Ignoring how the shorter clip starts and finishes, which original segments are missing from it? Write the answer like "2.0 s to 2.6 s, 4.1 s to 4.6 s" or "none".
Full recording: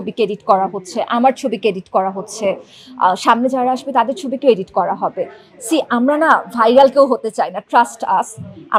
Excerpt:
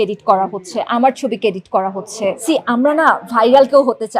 2.6 s to 5.6 s